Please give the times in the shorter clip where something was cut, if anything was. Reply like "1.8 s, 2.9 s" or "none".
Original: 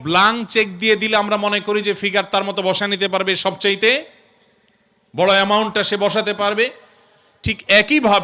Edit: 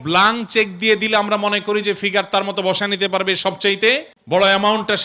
4.1 s